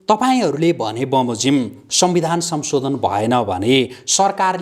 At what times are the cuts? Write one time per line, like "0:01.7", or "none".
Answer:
none